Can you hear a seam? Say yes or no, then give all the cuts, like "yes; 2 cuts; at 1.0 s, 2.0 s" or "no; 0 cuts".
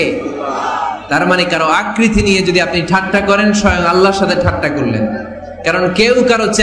no; 0 cuts